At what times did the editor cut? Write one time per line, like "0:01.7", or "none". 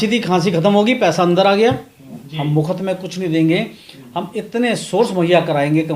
0:02.0